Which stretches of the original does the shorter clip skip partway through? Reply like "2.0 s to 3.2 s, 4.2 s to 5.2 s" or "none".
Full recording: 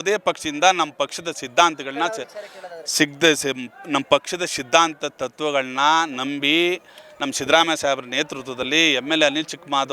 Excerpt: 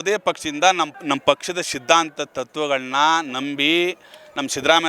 0.9 s to 3.8 s